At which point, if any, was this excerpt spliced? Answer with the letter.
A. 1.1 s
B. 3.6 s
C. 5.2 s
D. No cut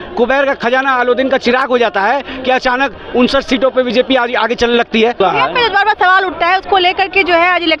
C